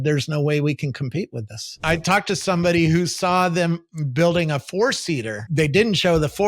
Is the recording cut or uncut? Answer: cut